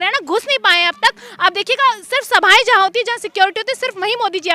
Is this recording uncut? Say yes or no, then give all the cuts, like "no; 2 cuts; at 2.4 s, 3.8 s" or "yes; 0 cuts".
yes; 0 cuts